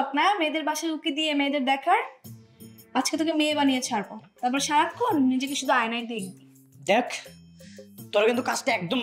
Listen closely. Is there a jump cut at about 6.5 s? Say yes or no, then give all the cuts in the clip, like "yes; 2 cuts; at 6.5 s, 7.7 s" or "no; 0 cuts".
no; 0 cuts